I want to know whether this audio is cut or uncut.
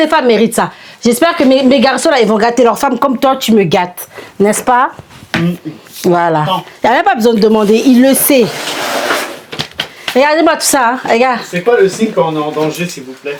uncut